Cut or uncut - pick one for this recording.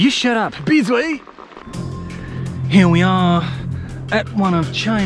cut